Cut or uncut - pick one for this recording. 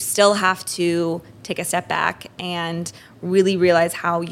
uncut